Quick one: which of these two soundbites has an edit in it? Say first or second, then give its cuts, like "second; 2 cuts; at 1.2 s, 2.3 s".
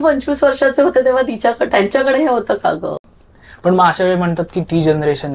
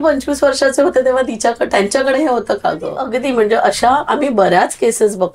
second; 1 cut; at 3.1 s